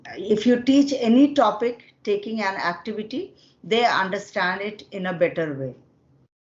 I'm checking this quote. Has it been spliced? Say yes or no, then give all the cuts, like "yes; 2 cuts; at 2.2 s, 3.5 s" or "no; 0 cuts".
no; 0 cuts